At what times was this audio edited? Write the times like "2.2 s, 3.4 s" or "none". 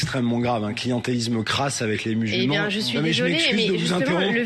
none